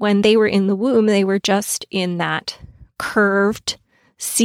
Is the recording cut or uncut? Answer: uncut